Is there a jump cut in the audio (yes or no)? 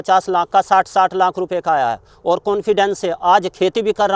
no